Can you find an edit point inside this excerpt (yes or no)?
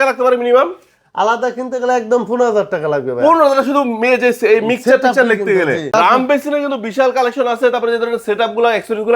yes